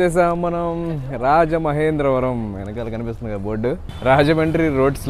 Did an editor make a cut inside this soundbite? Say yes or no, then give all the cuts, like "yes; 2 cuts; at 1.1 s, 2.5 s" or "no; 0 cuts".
yes; 1 cut; at 3.9 s